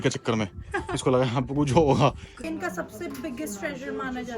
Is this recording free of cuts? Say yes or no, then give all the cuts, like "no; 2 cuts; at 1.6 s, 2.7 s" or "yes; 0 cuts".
no; 1 cut; at 2.4 s